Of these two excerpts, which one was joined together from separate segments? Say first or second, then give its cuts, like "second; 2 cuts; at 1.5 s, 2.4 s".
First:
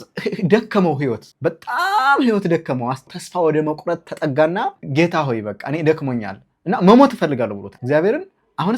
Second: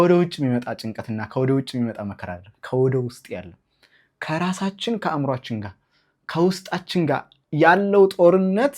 first; 4 cuts; at 1.3 s, 3.1 s, 4.8 s, 7.7 s